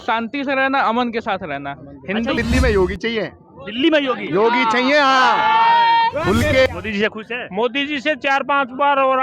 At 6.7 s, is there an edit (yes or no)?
yes